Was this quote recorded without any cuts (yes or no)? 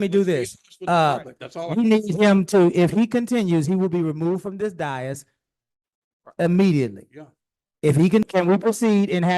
no